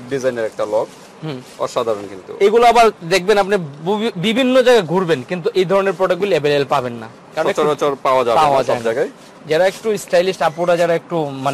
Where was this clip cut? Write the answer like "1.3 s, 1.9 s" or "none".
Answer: none